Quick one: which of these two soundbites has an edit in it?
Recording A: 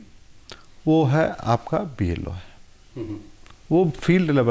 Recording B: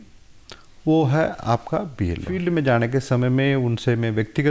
B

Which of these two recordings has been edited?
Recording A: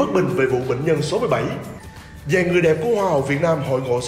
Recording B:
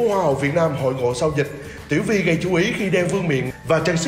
A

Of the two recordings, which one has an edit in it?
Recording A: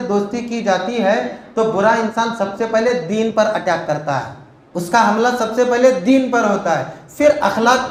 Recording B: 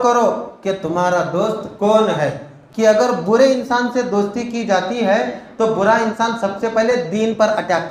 B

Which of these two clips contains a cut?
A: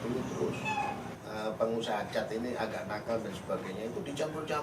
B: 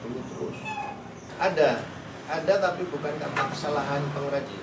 A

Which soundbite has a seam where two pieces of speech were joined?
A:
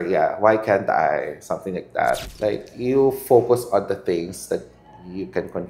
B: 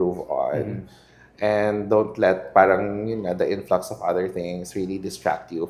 A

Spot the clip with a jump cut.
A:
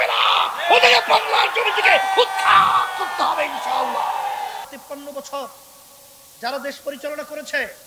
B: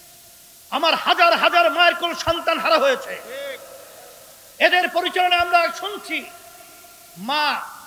A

